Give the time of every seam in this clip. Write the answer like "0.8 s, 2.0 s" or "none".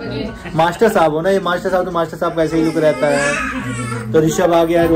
none